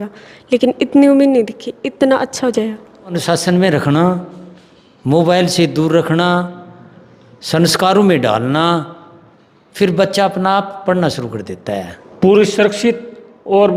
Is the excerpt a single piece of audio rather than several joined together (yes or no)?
no